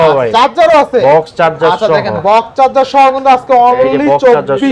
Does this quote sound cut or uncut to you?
uncut